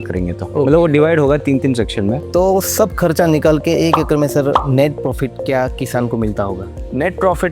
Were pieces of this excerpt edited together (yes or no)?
yes